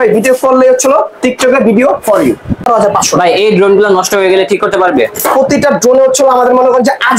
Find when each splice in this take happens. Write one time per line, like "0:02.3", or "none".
0:02.7